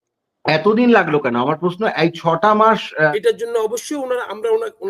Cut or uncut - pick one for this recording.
cut